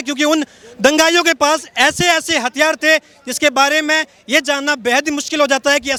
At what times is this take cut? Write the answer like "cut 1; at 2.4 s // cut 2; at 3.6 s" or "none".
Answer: none